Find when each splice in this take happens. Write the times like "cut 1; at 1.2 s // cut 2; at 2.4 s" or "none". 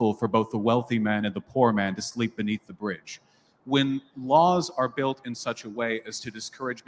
none